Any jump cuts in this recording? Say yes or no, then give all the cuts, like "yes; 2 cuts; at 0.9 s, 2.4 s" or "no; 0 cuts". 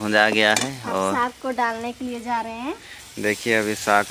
no; 0 cuts